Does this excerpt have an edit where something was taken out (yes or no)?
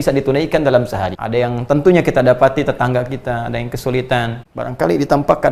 yes